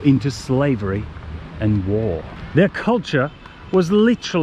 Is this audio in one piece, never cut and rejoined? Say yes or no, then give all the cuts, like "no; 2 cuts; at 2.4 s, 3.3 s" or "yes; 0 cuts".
no; 1 cut; at 2.3 s